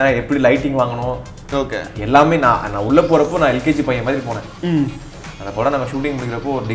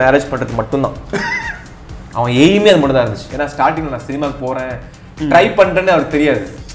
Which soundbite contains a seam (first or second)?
second